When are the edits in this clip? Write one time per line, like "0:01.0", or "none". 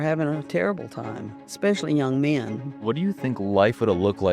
0:02.8